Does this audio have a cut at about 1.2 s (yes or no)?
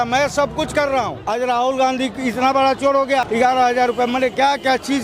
yes